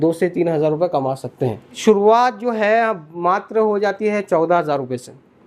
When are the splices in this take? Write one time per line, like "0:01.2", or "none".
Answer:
0:01.8